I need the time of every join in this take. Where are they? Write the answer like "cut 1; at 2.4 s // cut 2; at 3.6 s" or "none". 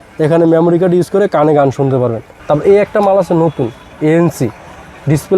cut 1; at 2.3 s